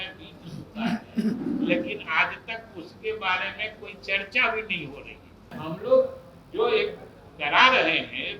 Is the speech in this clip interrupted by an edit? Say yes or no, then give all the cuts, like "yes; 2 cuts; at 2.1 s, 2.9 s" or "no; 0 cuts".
yes; 1 cut; at 5.5 s